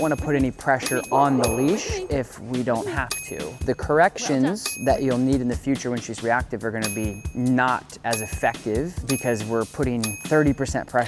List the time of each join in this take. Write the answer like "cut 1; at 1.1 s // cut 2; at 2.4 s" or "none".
cut 1; at 3.6 s // cut 2; at 7.2 s // cut 3; at 9.1 s // cut 4; at 10.2 s